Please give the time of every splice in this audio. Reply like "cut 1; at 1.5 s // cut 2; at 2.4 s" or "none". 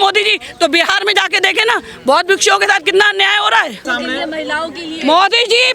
cut 1; at 3.9 s

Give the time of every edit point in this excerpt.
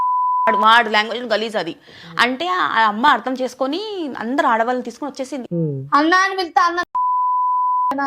cut 1; at 5.4 s

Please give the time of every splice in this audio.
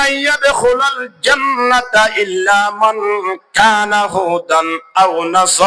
none

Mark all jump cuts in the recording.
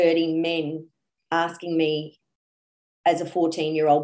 none

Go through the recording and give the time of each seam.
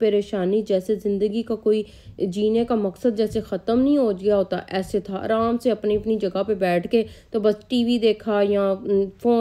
none

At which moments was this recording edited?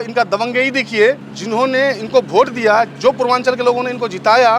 cut 1; at 1.3 s

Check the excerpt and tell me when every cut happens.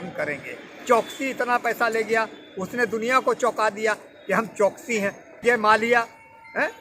cut 1; at 5.4 s

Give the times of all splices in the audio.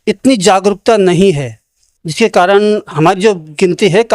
cut 1; at 2.9 s

